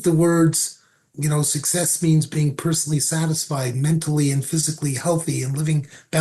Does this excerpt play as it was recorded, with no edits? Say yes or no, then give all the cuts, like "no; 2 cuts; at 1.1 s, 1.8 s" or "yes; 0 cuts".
no; 1 cut; at 1.1 s